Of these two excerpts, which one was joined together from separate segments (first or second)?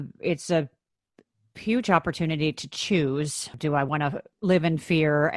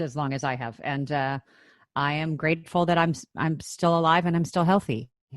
first